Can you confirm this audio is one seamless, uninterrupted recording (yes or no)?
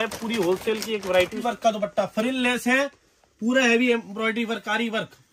no